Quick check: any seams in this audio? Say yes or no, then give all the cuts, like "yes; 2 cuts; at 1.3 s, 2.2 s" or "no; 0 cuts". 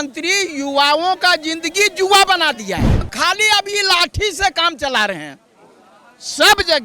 yes; 1 cut; at 3.1 s